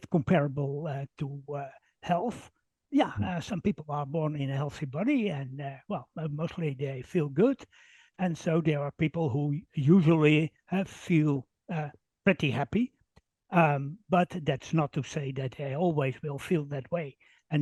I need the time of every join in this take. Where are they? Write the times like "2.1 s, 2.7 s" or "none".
none